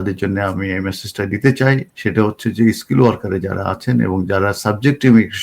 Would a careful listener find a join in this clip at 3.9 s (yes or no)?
no